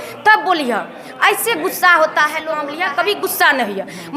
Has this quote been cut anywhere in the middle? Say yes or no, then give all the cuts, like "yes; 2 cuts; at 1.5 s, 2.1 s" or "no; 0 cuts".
yes; 1 cut; at 2.6 s